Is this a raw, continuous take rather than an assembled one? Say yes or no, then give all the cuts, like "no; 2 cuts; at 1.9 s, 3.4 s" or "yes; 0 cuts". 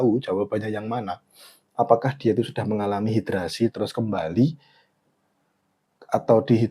yes; 0 cuts